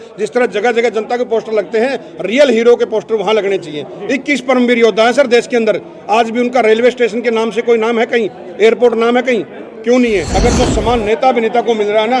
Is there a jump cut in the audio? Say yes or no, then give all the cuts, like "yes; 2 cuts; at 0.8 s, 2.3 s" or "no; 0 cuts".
yes; 1 cut; at 10.3 s